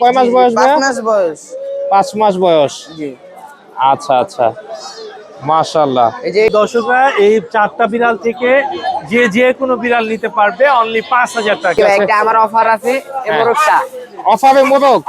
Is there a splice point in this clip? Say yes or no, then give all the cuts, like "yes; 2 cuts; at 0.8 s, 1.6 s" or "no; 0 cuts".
yes; 2 cuts; at 6.5 s, 11.8 s